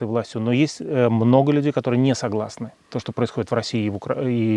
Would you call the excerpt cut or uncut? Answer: uncut